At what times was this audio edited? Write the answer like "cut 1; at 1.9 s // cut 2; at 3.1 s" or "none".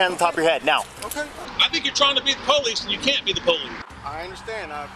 cut 1; at 1.4 s // cut 2; at 3.8 s